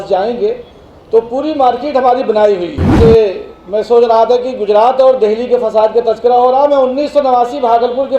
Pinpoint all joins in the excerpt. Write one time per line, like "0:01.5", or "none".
0:02.8